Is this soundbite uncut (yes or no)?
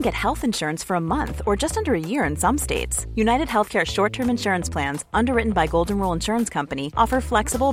yes